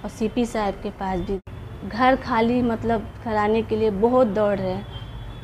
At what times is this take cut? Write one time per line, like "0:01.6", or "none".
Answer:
0:01.5